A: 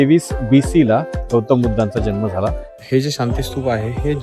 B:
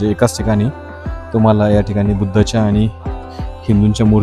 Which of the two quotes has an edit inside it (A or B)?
A